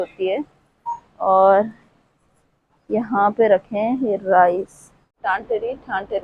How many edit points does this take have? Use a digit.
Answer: 1